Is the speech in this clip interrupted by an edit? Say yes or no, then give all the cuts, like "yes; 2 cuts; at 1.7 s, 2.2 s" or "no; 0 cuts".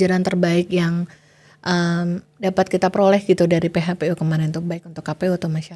no; 0 cuts